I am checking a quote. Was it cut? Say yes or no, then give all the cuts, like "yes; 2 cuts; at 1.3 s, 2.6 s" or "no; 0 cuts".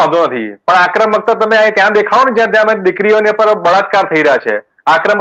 no; 0 cuts